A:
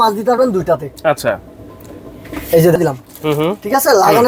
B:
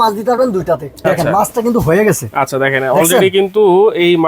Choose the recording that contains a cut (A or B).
B